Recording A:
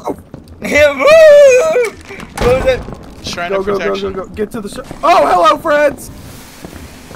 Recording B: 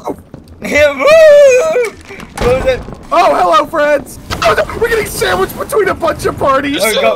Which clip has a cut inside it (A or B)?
B